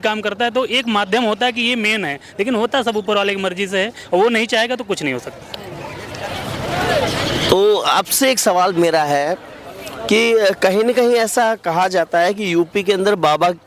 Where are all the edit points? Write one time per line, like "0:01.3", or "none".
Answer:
none